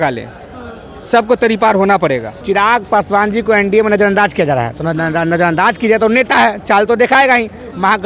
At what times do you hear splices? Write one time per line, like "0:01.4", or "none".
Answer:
0:02.3